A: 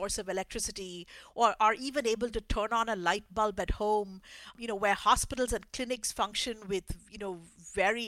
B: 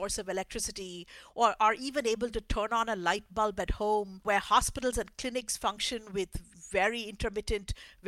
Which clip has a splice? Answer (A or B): B